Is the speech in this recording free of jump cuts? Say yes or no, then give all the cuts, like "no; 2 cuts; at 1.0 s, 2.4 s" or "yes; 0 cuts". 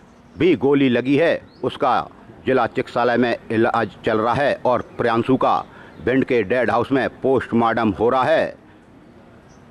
yes; 0 cuts